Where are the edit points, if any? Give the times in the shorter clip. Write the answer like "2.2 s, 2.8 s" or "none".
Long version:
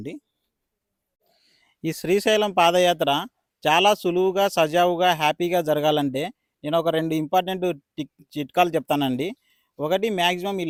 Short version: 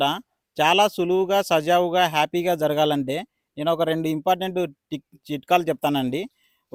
none